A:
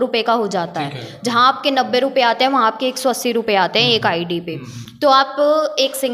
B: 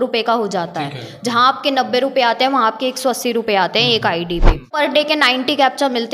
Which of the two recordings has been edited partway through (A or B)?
B